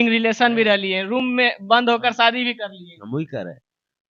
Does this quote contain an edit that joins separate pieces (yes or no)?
no